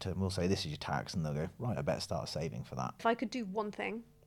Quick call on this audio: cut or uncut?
cut